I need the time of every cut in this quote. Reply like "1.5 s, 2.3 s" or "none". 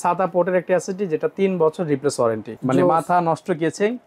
2.5 s